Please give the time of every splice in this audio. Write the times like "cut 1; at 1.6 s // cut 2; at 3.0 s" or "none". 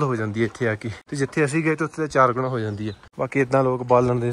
cut 1; at 1.0 s // cut 2; at 3.0 s